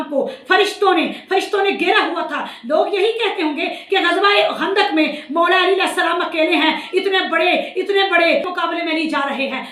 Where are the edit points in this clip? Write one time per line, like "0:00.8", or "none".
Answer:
0:08.5